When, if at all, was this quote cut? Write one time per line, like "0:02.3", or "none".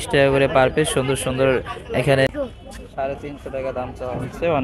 0:02.3